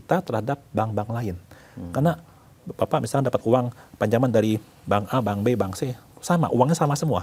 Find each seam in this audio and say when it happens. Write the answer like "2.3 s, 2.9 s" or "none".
none